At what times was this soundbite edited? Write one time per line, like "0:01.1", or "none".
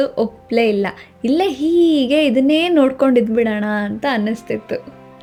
none